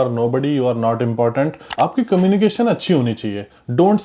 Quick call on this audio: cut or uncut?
cut